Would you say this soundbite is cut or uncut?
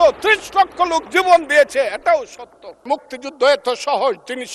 cut